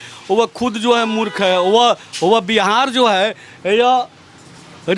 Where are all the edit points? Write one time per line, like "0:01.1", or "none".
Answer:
none